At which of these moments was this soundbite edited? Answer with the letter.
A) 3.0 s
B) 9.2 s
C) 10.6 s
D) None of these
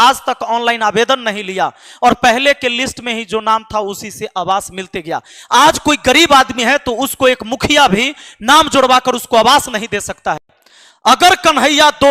C